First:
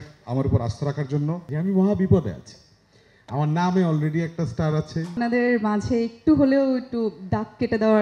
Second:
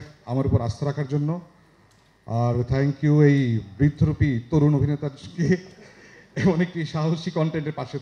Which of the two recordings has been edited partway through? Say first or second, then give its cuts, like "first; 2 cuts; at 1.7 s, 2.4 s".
first; 2 cuts; at 1.5 s, 5.1 s